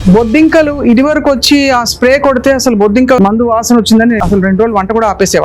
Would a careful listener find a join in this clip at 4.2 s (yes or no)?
yes